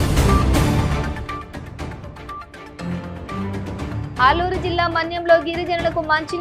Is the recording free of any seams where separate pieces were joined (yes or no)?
no